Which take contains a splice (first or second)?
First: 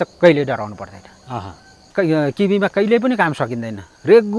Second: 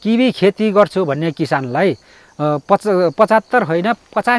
first